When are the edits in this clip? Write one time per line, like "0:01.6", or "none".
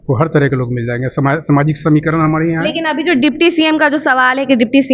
none